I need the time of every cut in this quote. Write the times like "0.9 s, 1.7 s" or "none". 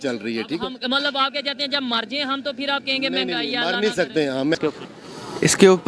4.6 s

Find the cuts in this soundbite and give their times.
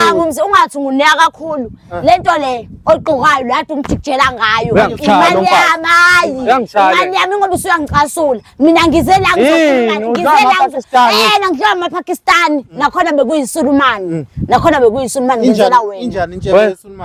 none

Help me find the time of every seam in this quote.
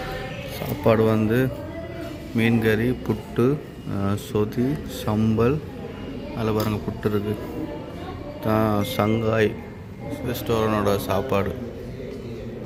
none

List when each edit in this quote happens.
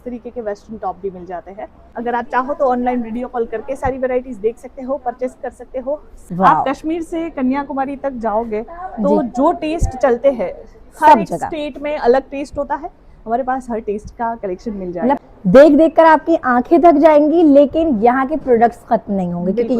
1.8 s, 6.1 s, 15.2 s

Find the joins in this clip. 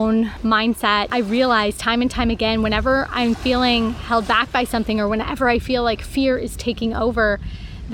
1.1 s

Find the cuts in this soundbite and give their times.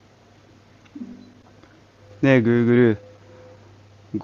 2.0 s

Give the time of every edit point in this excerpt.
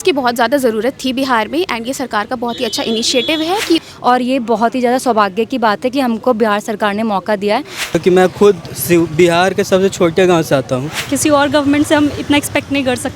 3.8 s, 7.9 s, 11.1 s

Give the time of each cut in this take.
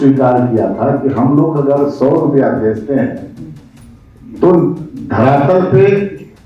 none

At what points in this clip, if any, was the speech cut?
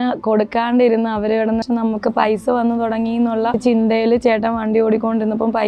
1.6 s, 3.6 s

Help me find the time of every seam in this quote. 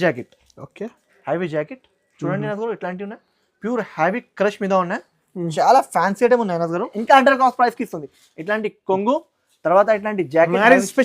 6.9 s

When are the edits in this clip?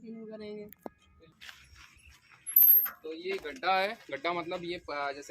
1.1 s

